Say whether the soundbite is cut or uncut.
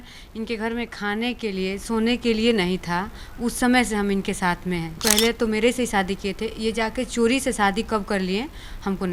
cut